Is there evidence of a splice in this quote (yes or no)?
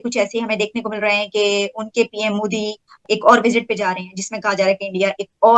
no